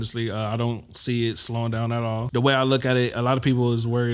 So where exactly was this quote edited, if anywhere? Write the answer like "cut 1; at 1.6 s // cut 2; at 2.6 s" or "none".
cut 1; at 2.2 s

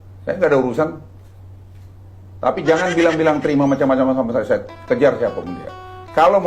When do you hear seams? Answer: none

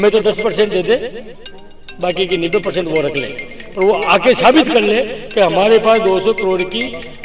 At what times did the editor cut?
none

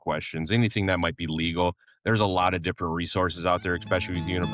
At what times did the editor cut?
cut 1; at 1.9 s

